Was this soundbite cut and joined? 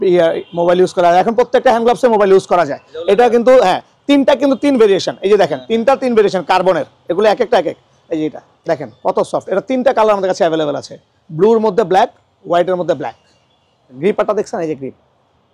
yes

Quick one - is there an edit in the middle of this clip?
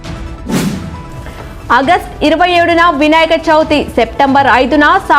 yes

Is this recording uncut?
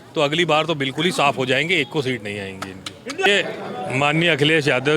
no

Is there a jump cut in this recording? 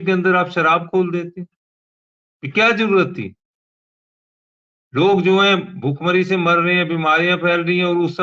no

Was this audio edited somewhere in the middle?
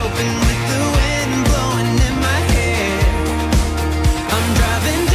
no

